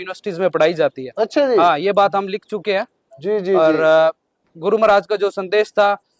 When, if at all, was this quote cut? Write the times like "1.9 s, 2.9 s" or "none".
none